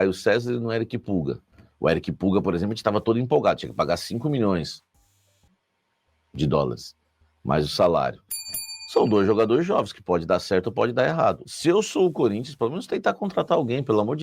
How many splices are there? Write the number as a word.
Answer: one